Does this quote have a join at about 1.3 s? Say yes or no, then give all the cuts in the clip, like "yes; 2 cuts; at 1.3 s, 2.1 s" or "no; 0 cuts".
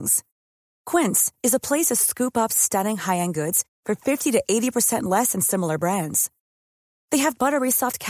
no; 0 cuts